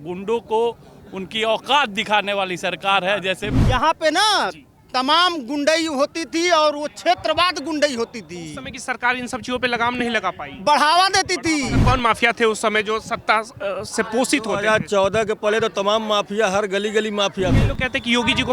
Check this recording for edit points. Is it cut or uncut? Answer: cut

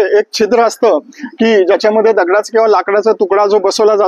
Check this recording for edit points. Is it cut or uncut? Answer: uncut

